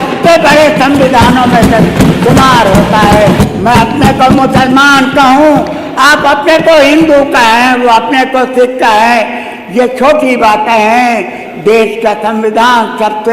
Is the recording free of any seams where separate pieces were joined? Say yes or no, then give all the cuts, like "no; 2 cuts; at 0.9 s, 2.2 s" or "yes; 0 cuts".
no; 1 cut; at 3.4 s